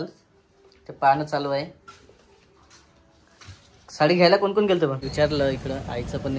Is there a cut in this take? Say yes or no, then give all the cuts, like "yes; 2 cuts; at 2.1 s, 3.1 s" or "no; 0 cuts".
yes; 1 cut; at 5.0 s